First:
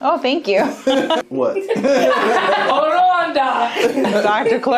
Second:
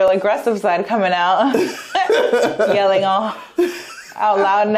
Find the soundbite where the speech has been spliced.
first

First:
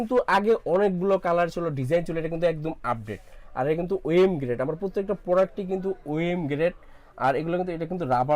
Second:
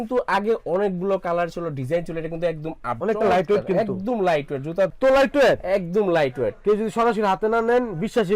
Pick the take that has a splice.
second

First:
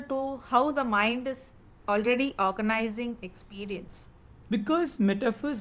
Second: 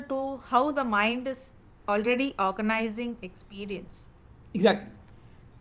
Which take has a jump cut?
first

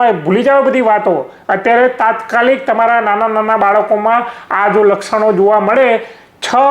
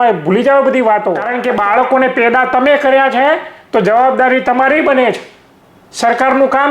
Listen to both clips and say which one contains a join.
second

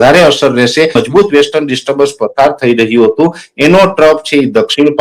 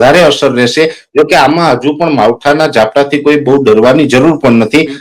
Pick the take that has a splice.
first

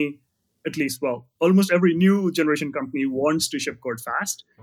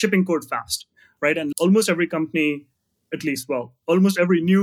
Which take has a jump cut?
second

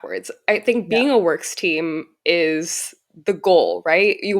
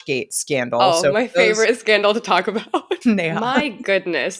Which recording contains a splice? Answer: second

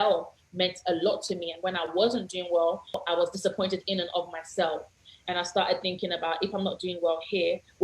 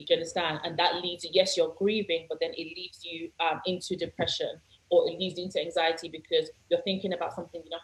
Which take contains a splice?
first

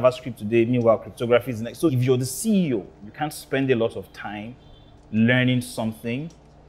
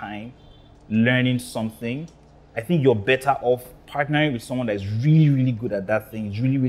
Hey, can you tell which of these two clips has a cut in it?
first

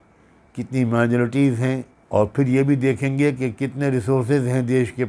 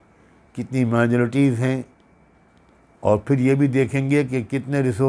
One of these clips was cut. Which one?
first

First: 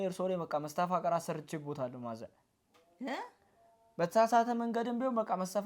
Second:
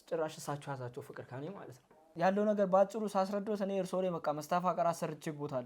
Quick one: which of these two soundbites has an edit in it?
second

